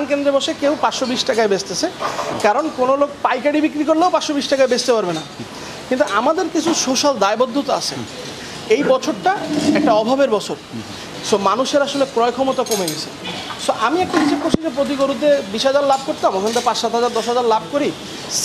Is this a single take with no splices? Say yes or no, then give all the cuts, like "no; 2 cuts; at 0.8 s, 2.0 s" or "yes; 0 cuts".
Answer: yes; 0 cuts